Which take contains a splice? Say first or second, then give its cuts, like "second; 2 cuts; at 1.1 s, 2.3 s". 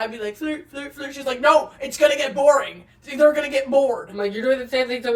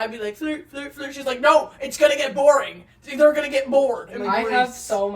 second; 1 cut; at 4.1 s